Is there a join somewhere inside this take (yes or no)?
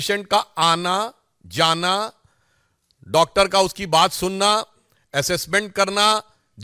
no